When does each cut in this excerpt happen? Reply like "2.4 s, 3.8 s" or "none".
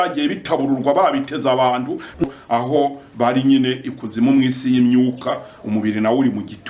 2.2 s